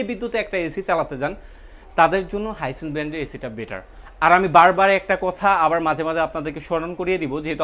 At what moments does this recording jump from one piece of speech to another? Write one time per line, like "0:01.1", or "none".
none